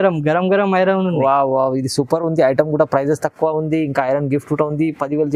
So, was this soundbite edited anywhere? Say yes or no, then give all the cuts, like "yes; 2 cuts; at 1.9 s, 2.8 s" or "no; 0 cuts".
no; 0 cuts